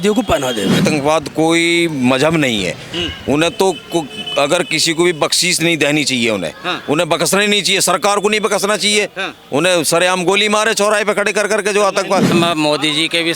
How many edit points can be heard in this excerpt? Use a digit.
2